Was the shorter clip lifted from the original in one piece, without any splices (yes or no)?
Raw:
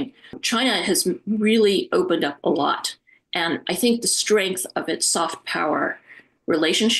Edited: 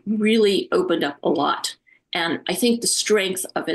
yes